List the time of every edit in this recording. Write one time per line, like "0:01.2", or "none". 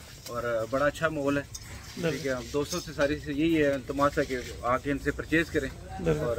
none